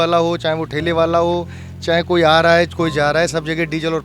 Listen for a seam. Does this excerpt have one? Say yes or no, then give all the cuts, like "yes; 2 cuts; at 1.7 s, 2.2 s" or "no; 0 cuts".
no; 0 cuts